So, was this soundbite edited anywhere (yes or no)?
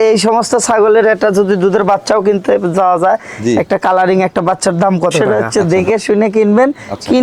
yes